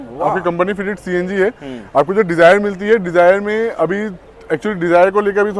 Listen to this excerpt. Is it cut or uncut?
uncut